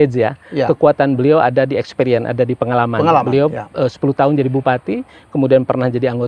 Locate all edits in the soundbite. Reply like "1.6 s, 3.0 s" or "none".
none

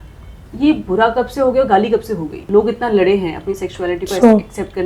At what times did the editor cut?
2.4 s

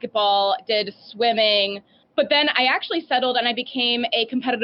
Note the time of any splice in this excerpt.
2.0 s

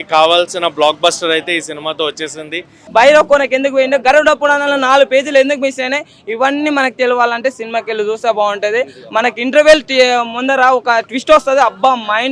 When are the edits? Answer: 2.8 s

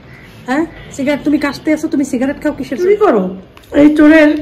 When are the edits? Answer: 2.9 s

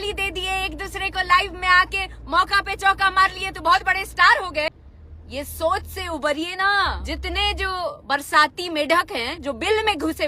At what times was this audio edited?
4.7 s, 7.0 s

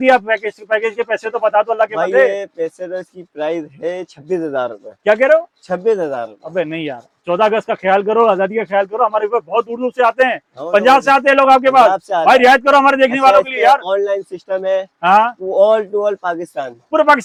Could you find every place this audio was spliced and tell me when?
none

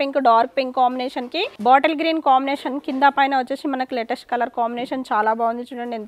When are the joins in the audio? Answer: none

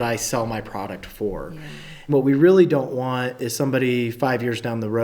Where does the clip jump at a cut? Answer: 2.1 s

